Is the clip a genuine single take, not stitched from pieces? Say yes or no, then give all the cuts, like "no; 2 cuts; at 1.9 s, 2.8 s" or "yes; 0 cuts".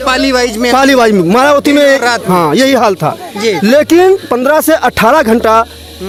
yes; 0 cuts